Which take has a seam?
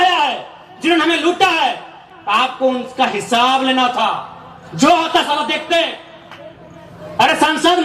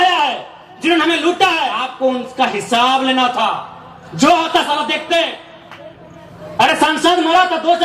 second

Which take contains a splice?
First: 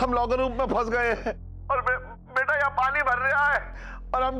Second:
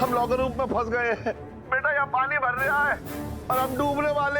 second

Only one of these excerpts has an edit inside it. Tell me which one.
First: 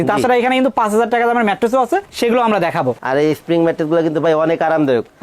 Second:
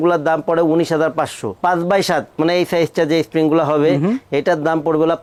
first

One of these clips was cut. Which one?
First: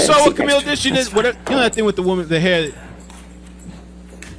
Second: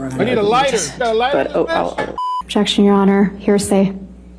second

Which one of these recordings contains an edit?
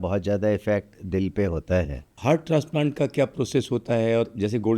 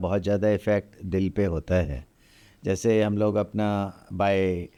first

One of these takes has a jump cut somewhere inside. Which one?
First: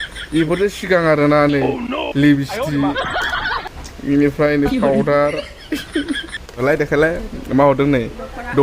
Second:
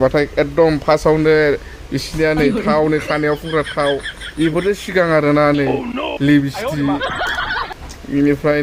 first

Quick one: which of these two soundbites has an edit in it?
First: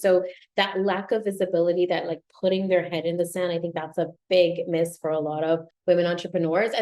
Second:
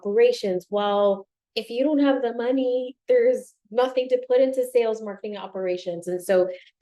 first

